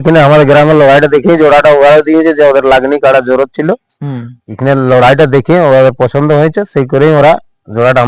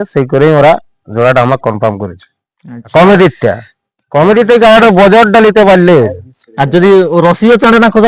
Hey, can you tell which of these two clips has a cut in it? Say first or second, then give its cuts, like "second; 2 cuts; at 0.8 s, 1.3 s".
second; 1 cut; at 2.9 s